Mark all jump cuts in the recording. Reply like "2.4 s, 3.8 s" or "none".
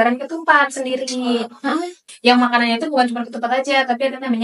2.0 s